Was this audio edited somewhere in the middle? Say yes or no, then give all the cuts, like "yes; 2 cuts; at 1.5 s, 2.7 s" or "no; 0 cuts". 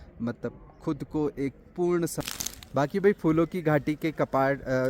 yes; 1 cut; at 2.1 s